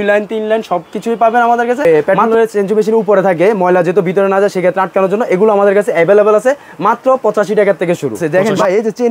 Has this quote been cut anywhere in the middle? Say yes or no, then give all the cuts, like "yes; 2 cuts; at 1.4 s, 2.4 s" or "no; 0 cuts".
yes; 2 cuts; at 1.9 s, 8.2 s